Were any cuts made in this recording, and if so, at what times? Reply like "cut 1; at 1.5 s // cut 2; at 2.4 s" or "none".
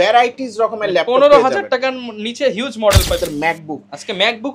cut 1; at 3.2 s